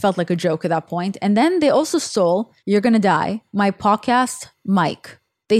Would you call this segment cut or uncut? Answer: cut